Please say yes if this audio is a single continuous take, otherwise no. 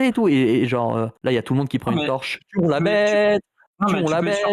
no